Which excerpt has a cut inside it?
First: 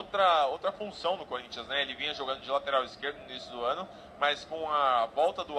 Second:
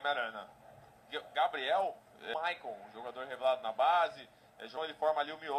second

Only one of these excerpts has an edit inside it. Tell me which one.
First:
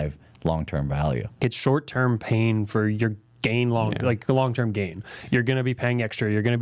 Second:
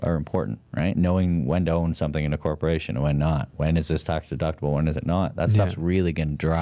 first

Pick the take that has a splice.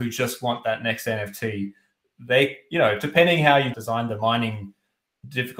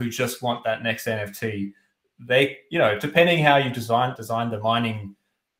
first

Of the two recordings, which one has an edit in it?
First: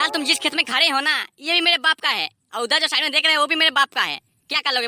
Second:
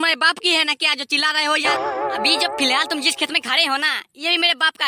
second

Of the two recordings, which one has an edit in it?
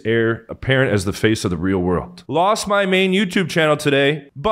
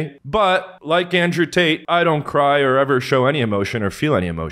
first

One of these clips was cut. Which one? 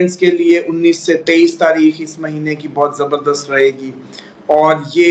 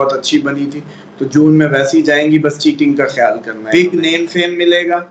second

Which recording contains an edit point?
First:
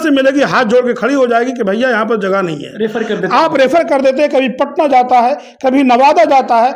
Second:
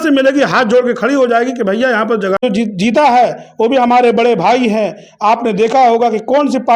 second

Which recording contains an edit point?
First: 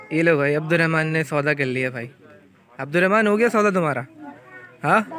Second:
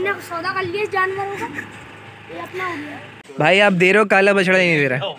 second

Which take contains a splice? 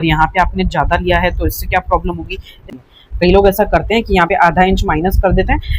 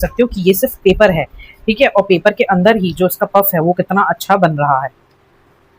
first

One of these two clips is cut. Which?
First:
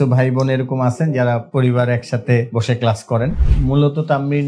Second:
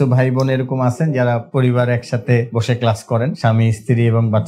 first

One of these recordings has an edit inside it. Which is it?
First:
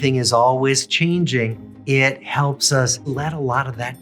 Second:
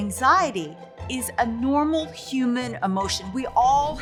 first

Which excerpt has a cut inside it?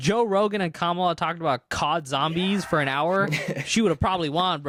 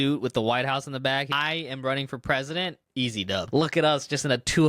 second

